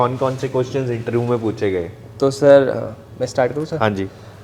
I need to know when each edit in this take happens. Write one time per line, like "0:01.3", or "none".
none